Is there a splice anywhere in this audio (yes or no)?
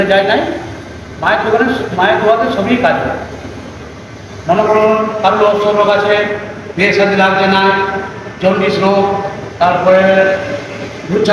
no